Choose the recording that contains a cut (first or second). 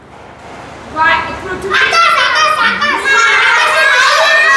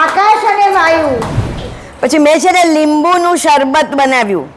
second